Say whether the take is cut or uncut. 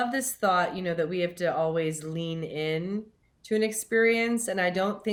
uncut